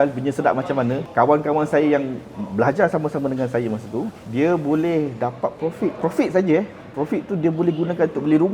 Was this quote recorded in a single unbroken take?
no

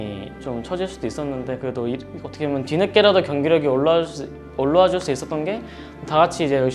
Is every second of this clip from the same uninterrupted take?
yes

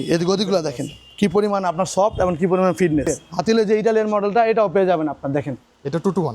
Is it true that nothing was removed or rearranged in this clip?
no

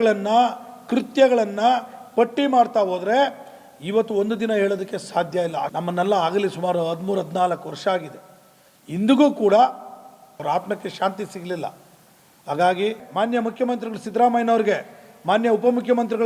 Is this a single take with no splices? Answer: no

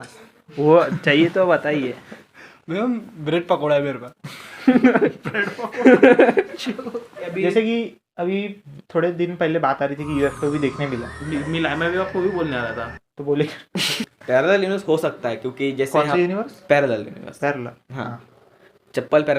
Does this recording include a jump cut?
yes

